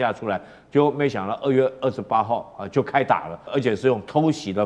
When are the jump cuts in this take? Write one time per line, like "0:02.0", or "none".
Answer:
0:03.5

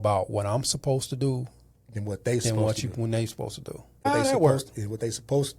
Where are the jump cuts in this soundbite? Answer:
0:04.1

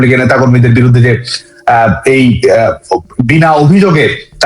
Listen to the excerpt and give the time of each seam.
none

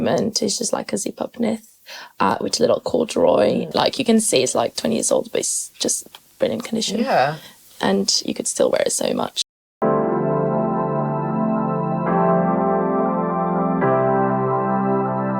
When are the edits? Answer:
0:09.3

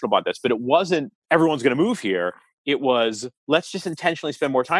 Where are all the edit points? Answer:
0:01.1
0:03.3

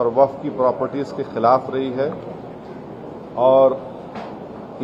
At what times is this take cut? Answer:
none

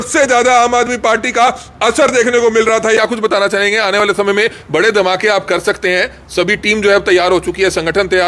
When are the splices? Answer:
0:03.0

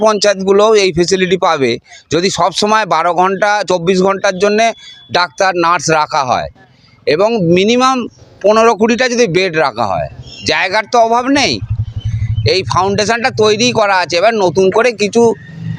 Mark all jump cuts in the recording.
none

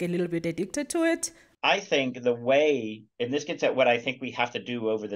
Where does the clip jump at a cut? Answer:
0:01.4

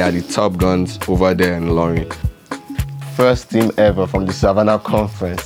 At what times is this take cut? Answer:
0:02.6

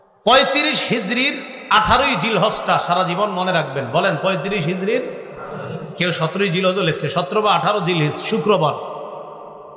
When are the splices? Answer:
none

